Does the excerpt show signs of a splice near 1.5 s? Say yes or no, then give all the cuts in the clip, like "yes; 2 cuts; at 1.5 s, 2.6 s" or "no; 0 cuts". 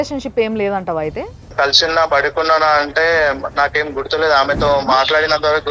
yes; 1 cut; at 1.5 s